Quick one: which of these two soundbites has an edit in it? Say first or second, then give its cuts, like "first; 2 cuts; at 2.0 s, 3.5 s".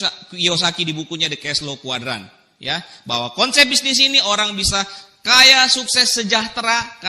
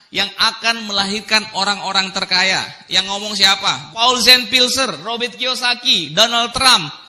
second; 1 cut; at 3.9 s